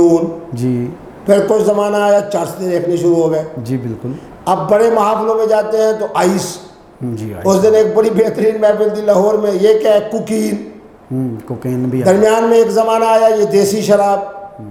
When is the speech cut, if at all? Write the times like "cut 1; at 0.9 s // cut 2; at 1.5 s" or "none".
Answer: none